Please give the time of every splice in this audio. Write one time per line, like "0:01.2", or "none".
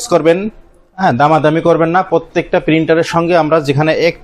none